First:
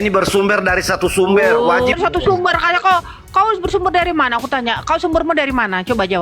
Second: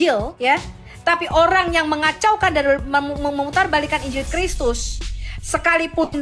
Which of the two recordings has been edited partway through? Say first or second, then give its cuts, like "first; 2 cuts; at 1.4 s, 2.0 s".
first; 1 cut; at 1.9 s